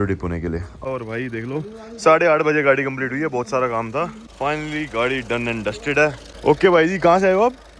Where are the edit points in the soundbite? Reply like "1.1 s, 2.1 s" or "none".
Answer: 0.9 s, 4.2 s, 6.3 s

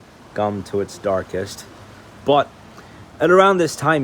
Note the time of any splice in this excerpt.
none

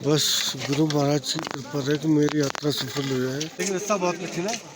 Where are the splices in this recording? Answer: 3.5 s

